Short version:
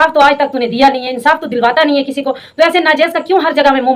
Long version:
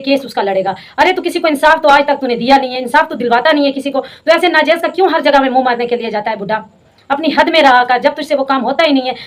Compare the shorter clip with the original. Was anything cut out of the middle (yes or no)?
no